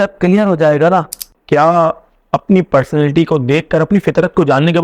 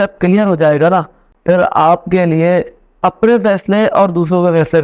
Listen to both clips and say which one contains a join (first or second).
first